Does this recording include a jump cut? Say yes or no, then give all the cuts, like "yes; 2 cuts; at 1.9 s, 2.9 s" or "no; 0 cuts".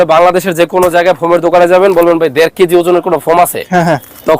no; 0 cuts